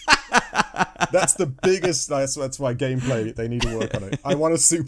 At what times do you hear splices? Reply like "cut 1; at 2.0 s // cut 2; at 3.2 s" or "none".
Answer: cut 1; at 1.1 s

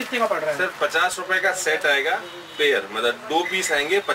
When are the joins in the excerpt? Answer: none

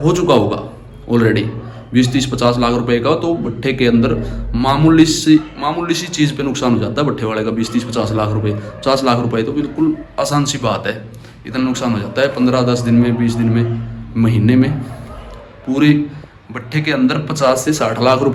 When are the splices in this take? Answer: none

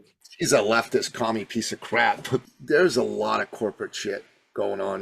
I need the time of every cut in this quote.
cut 1; at 2.4 s

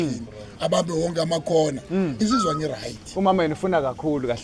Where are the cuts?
cut 1; at 2.2 s

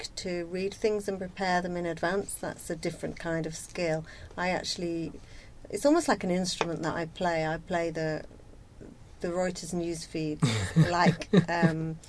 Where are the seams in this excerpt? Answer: none

